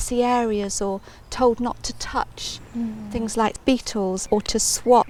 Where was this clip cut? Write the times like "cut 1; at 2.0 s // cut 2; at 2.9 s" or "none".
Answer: none